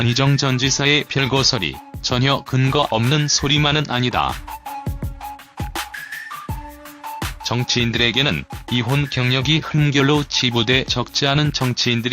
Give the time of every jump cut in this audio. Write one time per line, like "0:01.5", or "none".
0:04.3